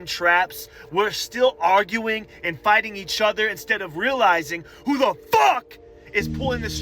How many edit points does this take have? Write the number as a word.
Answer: zero